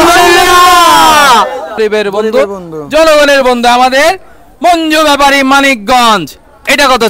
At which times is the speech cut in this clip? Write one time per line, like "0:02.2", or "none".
0:01.8